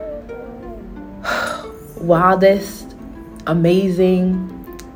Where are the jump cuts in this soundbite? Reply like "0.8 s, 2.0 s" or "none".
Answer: none